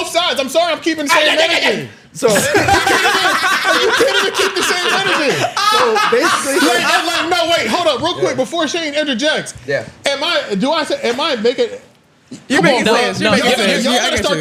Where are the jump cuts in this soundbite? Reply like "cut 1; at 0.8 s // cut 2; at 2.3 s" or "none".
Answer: none